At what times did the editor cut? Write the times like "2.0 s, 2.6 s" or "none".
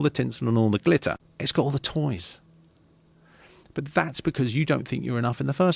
1.3 s